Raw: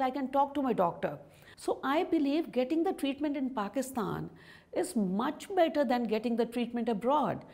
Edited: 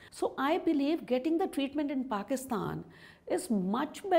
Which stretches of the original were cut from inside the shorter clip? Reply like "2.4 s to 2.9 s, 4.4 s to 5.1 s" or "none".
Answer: none